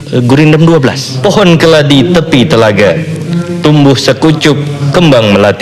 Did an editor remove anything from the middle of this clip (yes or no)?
yes